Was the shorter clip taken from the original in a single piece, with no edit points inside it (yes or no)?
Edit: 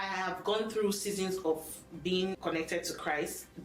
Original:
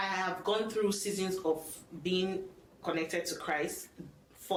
no